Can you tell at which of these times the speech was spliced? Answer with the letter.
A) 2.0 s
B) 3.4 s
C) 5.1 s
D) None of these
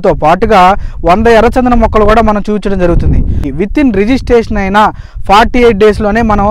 B